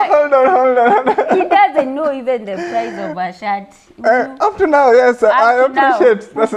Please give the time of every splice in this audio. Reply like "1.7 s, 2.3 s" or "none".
none